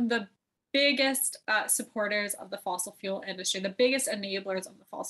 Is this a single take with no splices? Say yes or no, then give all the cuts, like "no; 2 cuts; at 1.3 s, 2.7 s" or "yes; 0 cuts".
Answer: yes; 0 cuts